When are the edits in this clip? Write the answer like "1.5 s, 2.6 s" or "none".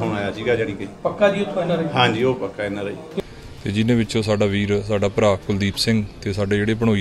3.1 s